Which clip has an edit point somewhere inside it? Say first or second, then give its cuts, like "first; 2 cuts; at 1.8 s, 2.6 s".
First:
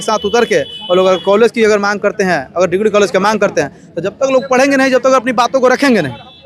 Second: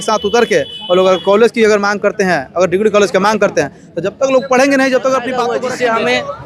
second; 1 cut; at 5.4 s